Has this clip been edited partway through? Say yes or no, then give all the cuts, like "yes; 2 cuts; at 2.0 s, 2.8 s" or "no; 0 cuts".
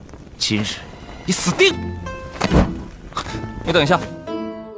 no; 0 cuts